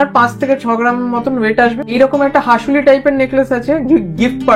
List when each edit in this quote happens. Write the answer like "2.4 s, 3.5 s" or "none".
1.8 s